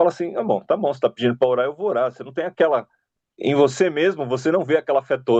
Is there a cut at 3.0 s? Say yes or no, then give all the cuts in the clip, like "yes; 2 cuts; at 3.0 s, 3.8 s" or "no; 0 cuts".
yes; 1 cut; at 3.0 s